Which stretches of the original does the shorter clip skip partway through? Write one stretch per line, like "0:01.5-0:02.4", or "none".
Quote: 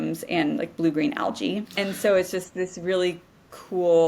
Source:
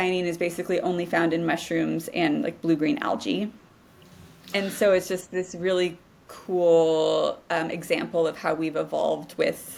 0:03.5-0:04.4